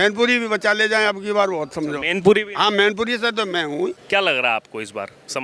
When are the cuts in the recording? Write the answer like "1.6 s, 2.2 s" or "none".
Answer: 4.0 s